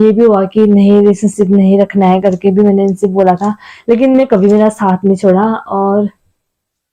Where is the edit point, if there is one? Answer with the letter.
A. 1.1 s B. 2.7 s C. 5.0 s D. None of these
D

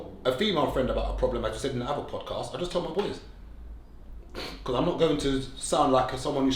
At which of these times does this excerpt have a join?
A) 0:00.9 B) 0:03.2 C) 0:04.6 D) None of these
D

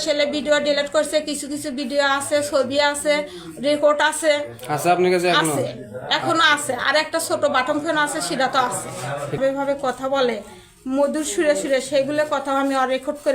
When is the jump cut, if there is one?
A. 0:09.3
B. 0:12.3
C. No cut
A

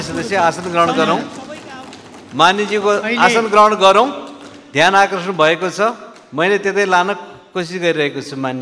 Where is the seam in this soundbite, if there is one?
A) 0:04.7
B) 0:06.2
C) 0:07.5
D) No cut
D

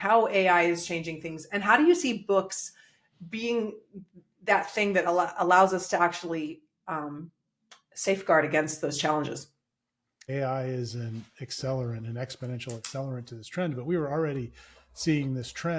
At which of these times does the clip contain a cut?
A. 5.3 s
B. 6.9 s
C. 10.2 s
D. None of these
C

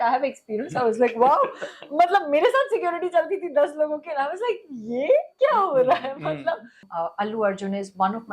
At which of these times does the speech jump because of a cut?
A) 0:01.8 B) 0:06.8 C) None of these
B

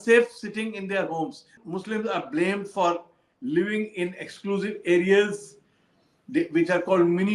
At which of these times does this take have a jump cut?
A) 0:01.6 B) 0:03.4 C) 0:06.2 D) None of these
A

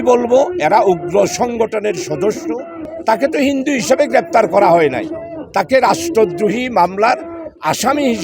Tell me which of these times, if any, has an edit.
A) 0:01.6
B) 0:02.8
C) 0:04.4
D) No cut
B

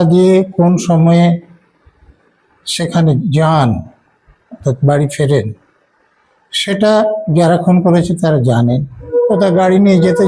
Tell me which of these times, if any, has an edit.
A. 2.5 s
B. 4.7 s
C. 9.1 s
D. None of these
C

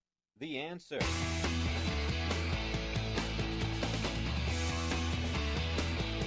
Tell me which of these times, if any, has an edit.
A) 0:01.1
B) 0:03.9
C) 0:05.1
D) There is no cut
A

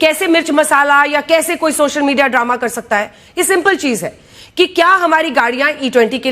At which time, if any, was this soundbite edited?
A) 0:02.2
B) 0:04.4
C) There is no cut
C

